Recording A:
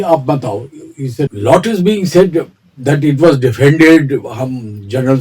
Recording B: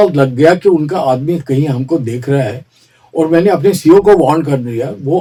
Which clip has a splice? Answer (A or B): A